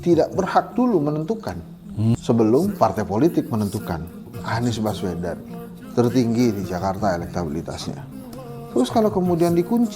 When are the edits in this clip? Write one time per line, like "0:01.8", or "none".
0:02.2
0:04.3

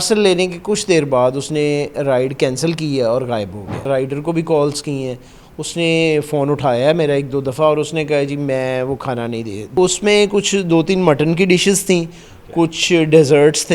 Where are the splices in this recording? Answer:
0:03.9
0:09.8

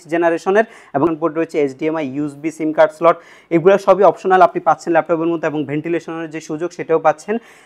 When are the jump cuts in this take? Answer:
0:01.1

